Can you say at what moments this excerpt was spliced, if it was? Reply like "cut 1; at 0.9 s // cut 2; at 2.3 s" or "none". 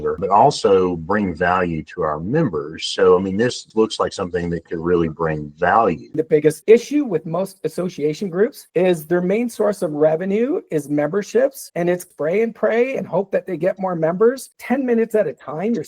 cut 1; at 6.2 s // cut 2; at 12.1 s // cut 3; at 14.5 s

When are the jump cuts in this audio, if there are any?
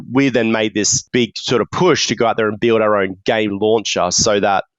cut 1; at 1.0 s

